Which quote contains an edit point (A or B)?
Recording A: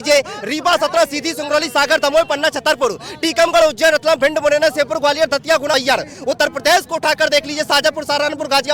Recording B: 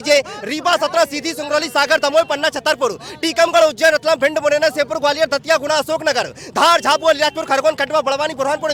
A